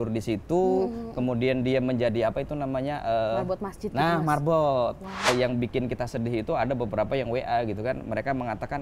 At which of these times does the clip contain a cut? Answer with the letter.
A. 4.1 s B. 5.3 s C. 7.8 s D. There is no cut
B